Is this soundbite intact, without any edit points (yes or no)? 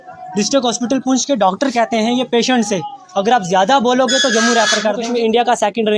no